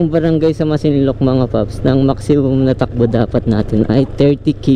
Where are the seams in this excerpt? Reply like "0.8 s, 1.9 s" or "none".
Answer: none